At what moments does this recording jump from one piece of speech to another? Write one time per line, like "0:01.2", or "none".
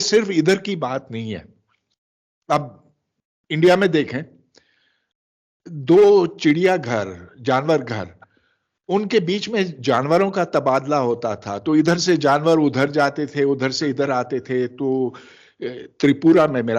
none